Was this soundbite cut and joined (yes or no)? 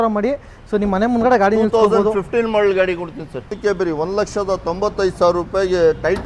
yes